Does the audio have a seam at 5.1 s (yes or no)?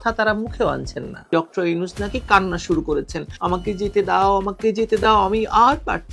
no